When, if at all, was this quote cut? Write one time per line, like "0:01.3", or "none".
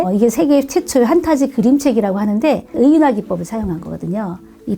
0:02.7